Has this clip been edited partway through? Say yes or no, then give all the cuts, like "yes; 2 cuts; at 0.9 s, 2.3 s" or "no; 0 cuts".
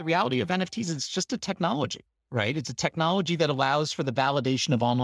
no; 0 cuts